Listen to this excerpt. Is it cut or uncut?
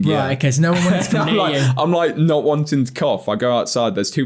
uncut